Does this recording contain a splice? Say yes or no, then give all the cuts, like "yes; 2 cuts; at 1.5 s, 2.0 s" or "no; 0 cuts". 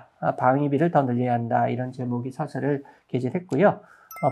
no; 0 cuts